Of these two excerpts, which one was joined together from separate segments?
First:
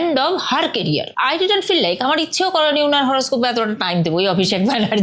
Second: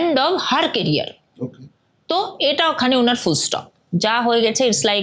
first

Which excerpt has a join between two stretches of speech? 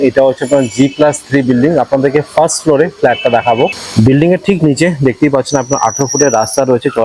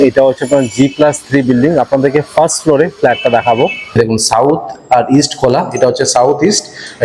second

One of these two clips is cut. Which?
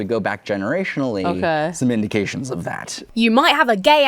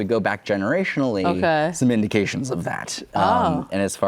first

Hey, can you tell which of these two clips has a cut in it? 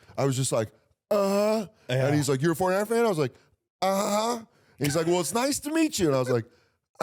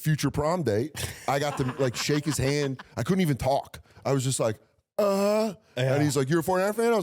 second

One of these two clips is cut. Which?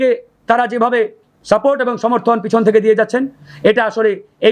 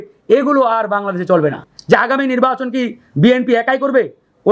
second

